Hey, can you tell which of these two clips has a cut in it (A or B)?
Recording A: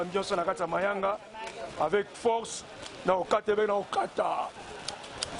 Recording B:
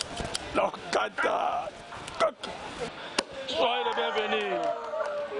B